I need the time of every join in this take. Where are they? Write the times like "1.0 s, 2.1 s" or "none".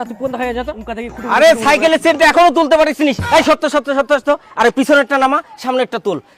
1.2 s